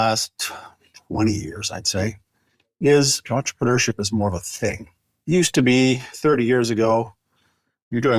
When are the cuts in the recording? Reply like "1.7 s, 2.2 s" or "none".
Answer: 3.2 s, 5.1 s, 6.1 s